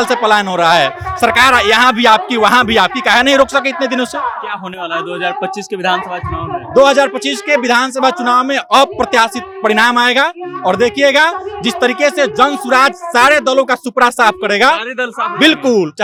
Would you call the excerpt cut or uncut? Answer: uncut